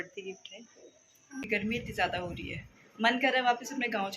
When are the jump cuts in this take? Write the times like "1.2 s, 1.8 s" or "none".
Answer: 1.2 s

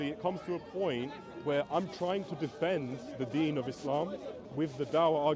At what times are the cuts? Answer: 4.4 s

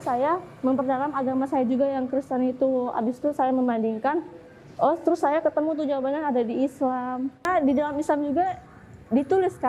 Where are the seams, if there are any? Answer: 7.5 s

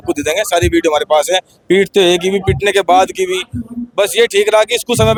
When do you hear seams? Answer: none

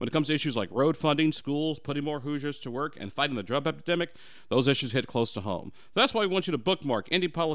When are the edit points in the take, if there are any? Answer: none

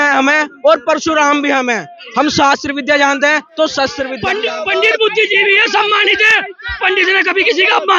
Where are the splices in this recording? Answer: 4.1 s

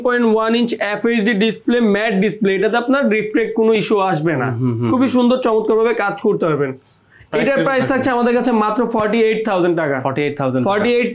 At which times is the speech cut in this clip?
none

